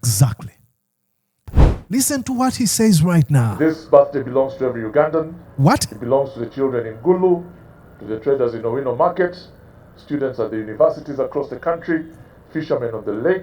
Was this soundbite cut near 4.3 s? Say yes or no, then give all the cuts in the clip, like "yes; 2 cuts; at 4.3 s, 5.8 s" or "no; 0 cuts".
no; 1 cut; at 1.6 s